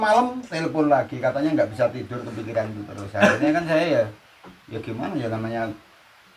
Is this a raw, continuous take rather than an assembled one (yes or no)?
yes